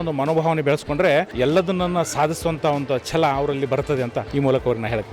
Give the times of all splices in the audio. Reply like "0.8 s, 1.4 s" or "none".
1.3 s, 4.2 s